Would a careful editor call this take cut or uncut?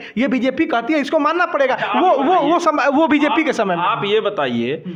uncut